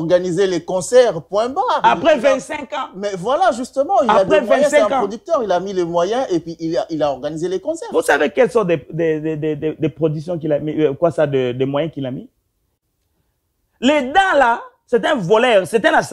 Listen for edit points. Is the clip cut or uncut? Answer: cut